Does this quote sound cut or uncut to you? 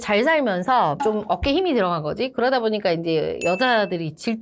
cut